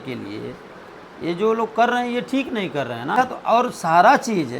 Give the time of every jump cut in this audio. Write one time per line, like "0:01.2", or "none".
0:03.2